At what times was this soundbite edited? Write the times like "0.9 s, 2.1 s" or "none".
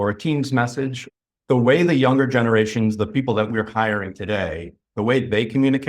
1.0 s